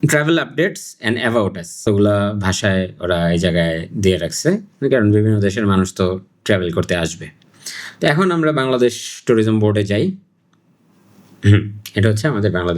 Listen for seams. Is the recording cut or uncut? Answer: cut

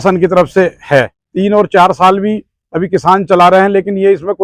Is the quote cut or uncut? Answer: cut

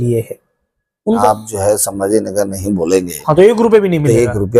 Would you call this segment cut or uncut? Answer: cut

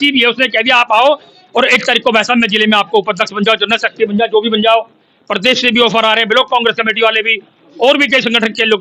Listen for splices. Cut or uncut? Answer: uncut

